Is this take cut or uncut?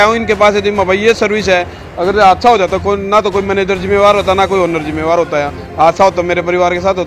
uncut